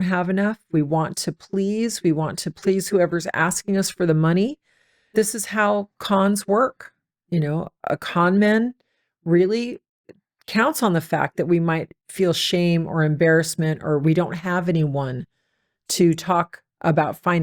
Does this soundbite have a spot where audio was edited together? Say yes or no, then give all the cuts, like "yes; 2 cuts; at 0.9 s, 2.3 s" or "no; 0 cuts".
yes; 1 cut; at 5.1 s